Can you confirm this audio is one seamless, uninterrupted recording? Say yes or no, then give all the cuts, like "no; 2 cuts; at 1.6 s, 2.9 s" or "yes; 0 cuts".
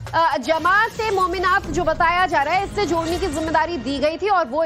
yes; 0 cuts